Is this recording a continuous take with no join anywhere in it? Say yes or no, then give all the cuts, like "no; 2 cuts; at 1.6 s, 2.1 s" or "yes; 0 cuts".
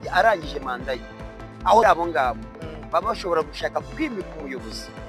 no; 1 cut; at 1.8 s